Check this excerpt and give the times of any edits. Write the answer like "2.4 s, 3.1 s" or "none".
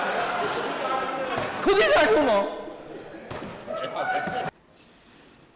4.5 s